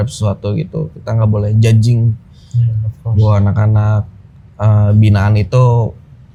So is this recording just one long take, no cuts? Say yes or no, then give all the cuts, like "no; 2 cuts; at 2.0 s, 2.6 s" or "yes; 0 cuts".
yes; 0 cuts